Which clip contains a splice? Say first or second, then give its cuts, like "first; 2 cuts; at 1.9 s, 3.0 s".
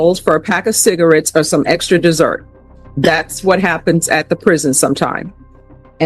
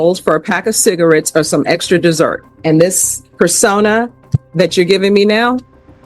second; 1 cut; at 2.5 s